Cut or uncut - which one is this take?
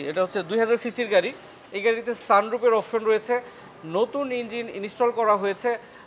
uncut